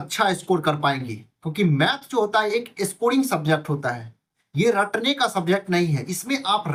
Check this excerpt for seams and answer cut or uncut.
uncut